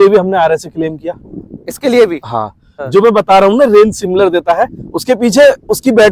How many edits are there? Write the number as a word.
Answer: one